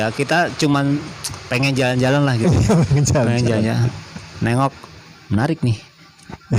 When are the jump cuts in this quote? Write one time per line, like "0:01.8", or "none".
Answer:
none